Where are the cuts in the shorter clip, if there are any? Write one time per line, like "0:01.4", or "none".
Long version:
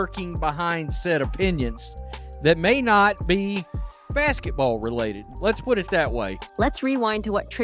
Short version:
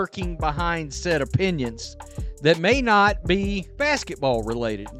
0:03.7